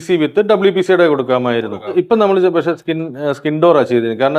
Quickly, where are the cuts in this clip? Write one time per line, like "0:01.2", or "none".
0:01.9